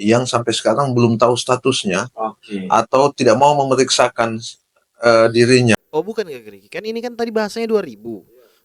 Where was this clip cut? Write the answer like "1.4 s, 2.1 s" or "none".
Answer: none